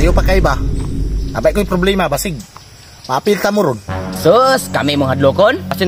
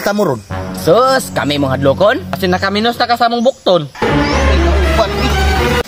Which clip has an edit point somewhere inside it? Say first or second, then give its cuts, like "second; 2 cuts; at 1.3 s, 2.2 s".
second; 1 cut; at 3.9 s